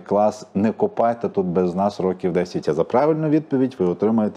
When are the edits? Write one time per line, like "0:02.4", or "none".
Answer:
0:02.6